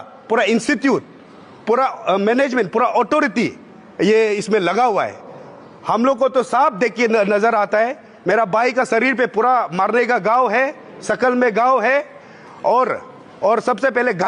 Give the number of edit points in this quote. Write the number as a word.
zero